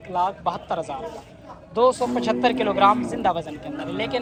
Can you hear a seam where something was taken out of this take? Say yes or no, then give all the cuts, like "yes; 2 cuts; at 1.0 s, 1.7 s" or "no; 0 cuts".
no; 0 cuts